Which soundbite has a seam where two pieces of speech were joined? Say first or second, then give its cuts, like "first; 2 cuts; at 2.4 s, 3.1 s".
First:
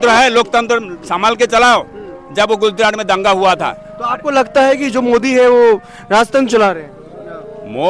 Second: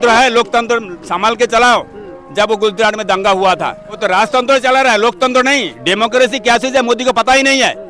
second; 1 cut; at 3.9 s